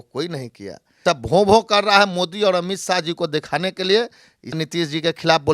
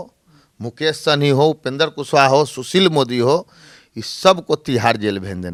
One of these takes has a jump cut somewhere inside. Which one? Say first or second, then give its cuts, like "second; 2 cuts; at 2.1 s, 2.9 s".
first; 2 cuts; at 1.0 s, 4.6 s